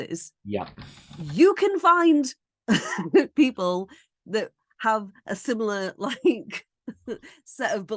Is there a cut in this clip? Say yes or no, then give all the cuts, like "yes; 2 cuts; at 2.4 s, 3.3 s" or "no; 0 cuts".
no; 0 cuts